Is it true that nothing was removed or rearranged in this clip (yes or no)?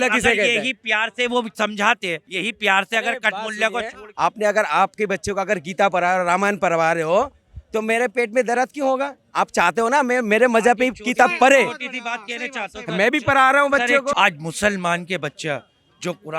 no